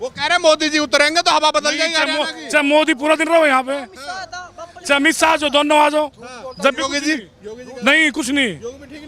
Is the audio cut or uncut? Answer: uncut